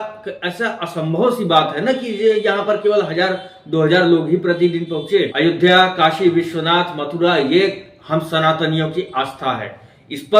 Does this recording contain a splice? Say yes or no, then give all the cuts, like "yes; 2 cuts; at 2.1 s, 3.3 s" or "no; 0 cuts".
yes; 1 cut; at 5.3 s